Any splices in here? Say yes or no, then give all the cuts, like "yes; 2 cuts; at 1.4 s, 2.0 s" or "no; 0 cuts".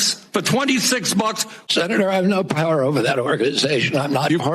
yes; 1 cut; at 1.5 s